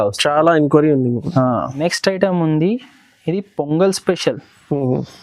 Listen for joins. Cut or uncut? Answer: cut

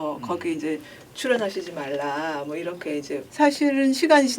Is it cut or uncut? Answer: cut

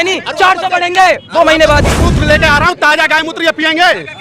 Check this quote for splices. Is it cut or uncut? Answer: cut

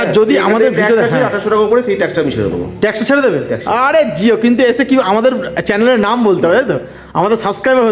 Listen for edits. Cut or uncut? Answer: uncut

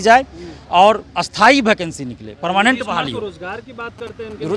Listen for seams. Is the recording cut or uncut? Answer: uncut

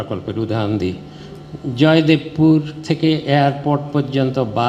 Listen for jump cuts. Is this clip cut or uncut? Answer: uncut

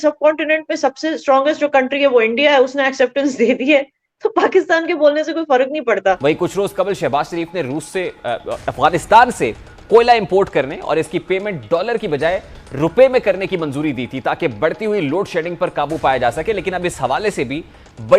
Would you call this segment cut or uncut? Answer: cut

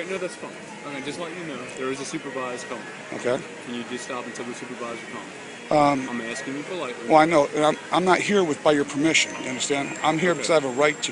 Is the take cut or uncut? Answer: cut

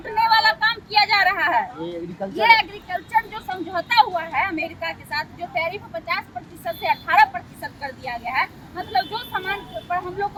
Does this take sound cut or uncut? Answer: uncut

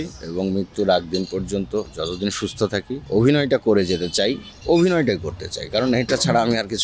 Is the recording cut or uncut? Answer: cut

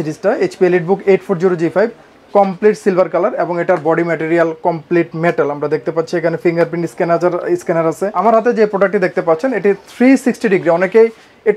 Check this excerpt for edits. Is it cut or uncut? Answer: cut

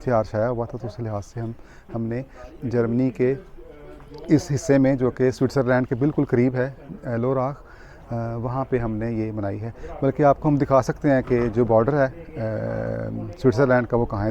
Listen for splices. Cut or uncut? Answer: uncut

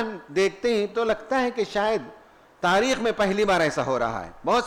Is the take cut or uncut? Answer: uncut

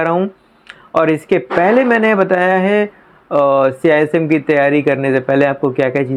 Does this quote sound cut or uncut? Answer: uncut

